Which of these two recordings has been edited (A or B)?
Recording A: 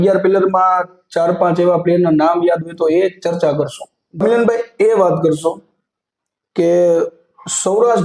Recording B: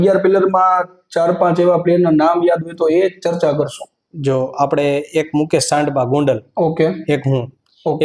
A